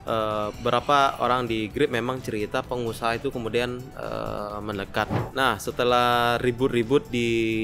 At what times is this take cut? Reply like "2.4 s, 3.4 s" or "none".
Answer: 5.2 s